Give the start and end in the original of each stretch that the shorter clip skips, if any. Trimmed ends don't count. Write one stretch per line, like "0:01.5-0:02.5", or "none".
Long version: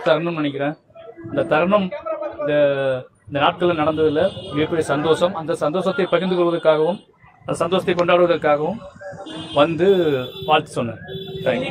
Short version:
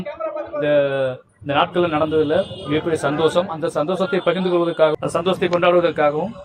0:06.8-0:07.4

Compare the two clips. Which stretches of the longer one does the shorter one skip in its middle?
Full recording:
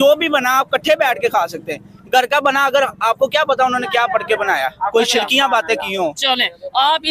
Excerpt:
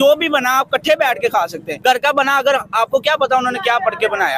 0:01.7-0:01.9

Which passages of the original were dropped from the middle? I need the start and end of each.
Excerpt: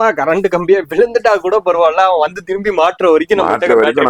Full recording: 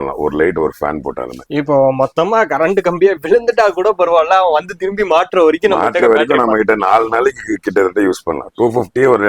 none

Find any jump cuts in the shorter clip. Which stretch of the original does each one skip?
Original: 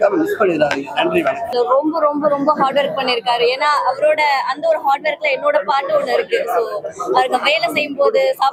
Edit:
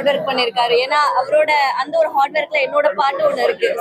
none

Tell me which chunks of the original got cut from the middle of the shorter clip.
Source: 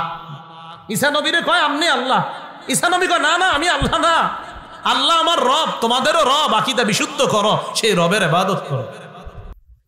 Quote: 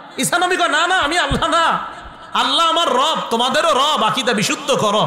none

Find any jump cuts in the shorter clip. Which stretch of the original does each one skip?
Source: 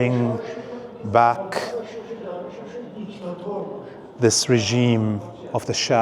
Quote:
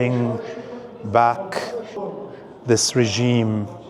0:01.9-0:03.5

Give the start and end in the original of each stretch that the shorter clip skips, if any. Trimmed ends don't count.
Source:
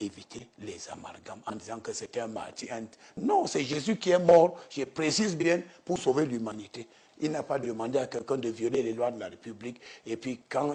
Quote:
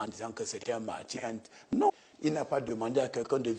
0:03.4-0:06.9

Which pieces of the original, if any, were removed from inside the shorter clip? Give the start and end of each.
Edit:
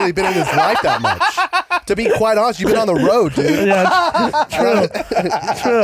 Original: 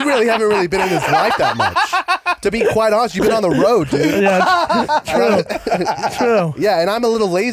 none

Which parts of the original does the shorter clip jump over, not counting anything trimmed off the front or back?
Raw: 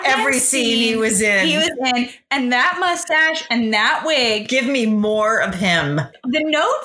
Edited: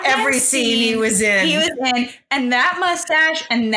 none

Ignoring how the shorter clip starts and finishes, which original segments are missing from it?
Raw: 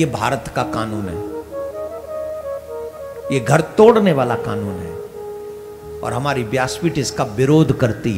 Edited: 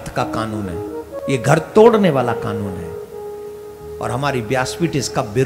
0:01.5-0:03.2

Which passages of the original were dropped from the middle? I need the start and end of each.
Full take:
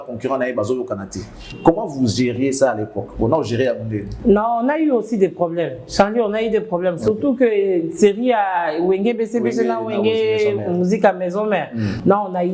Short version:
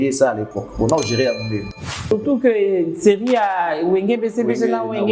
0:04.2-0:06.8

